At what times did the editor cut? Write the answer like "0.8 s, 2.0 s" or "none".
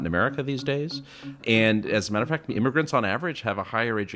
1.4 s

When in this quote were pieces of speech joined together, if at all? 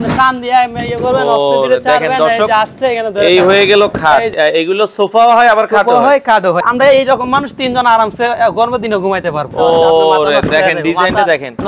4.3 s, 6.6 s, 9.5 s

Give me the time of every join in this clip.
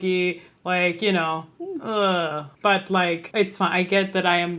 2.5 s, 3.2 s

